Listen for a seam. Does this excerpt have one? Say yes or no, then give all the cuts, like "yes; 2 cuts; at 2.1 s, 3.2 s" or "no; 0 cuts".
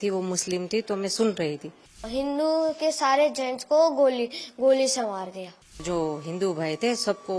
yes; 2 cuts; at 2.1 s, 5.8 s